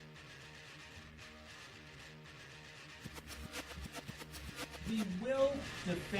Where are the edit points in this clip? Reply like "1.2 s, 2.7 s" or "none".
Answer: 0.9 s, 2.7 s